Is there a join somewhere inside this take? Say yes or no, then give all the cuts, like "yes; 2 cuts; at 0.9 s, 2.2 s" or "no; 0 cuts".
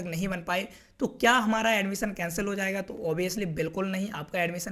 no; 0 cuts